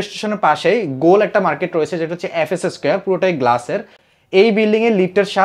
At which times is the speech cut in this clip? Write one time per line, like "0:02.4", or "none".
none